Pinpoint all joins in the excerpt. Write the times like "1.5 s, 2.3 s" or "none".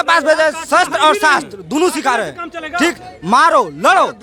none